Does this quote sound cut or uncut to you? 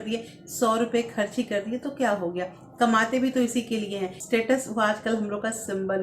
cut